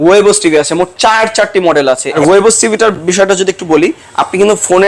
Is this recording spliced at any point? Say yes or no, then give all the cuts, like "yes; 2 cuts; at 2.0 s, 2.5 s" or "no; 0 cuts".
yes; 1 cut; at 2.2 s